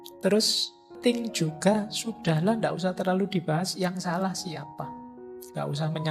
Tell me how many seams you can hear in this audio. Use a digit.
2